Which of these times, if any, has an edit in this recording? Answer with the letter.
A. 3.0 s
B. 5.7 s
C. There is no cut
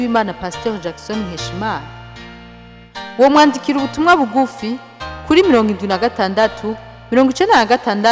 C